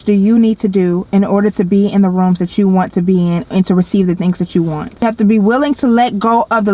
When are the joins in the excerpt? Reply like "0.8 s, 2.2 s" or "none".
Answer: 5.0 s